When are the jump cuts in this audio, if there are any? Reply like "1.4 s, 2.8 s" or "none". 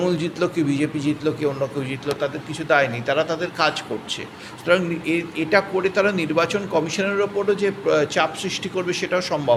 none